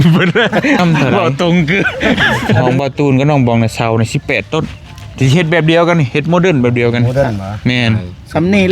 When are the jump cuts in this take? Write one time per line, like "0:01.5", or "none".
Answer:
0:02.6